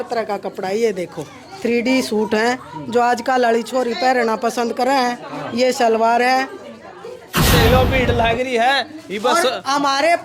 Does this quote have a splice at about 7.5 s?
yes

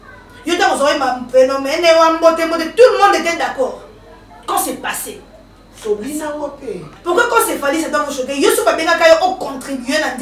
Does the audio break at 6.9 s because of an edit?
yes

